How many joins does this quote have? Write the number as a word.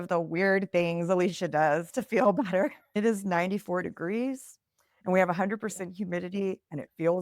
one